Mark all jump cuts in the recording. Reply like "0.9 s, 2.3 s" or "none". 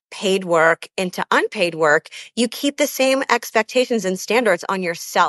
none